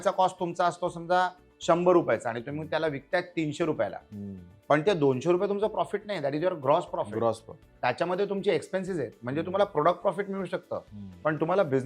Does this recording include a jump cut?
no; 0 cuts

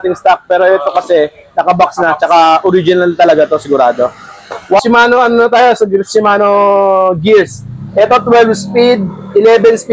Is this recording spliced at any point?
yes; 1 cut; at 4.8 s

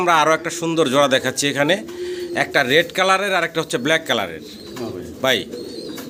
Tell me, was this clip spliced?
no; 0 cuts

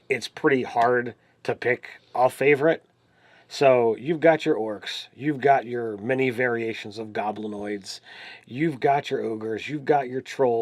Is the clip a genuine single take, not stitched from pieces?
no; 1 cut; at 5.7 s

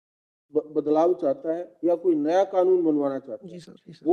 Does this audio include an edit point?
no; 0 cuts

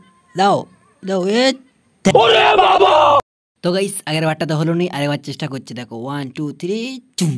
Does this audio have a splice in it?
no; 0 cuts

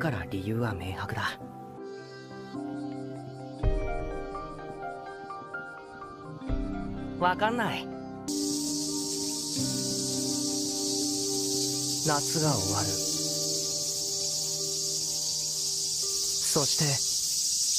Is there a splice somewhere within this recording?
no; 0 cuts

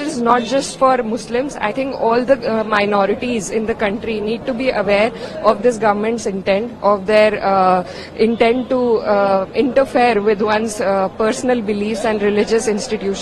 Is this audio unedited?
yes; 0 cuts

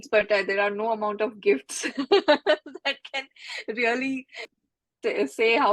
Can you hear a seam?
yes; 1 cut; at 4.5 s

